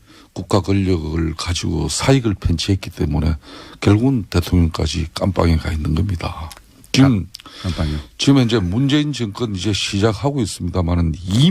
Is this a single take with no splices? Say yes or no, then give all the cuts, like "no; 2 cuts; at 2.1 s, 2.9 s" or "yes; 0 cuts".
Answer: no; 1 cut; at 8.2 s